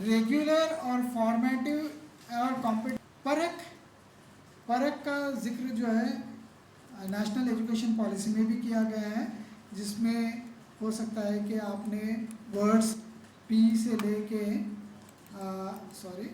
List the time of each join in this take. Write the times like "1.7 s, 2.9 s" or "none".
2.9 s